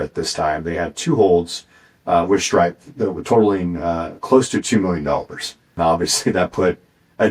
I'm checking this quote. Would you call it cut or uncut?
cut